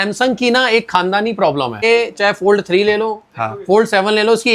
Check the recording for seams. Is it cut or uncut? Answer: cut